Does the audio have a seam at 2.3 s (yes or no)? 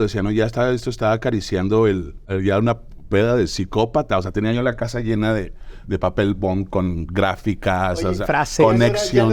yes